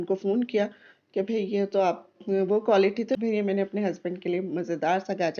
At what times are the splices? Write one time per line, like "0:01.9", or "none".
0:03.1